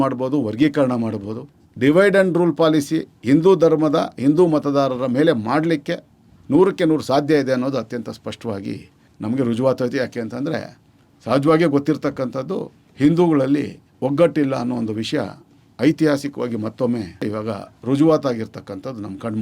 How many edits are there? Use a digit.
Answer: 1